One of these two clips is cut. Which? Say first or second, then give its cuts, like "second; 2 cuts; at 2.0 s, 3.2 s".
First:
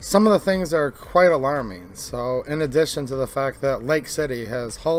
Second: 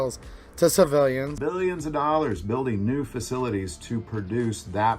second; 1 cut; at 1.3 s